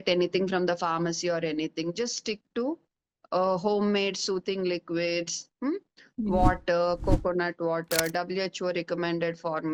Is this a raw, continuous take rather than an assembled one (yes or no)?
yes